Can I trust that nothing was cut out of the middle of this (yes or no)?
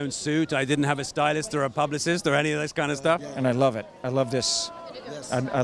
no